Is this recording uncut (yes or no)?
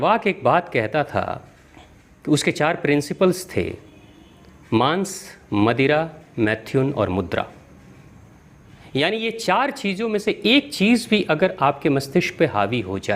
yes